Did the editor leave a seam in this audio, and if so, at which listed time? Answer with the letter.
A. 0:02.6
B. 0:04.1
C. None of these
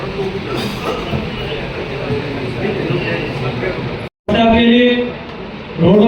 B